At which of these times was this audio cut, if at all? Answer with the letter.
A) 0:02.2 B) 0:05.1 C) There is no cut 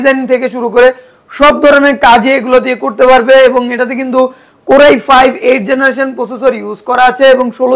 C